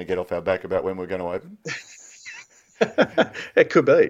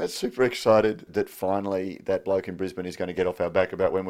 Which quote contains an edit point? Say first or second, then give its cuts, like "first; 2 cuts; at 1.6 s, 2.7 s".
second; 1 cut; at 1.1 s